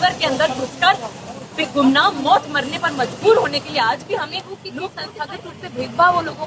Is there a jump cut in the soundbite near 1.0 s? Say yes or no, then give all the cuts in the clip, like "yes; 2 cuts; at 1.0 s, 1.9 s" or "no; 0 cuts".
no; 1 cut; at 5.0 s